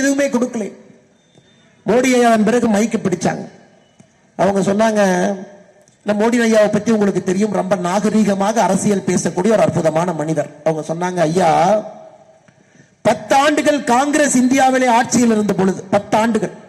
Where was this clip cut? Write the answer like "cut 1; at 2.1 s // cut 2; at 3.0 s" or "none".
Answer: none